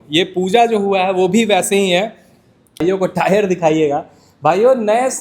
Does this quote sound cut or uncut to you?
cut